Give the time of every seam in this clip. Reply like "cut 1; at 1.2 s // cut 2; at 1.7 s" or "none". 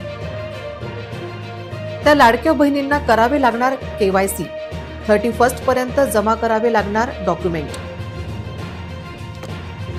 none